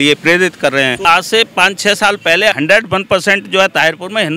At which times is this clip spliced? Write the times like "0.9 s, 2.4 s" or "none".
1.1 s, 2.6 s